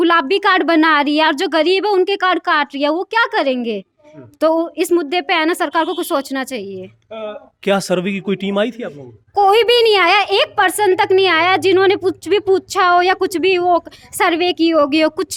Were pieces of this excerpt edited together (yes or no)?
no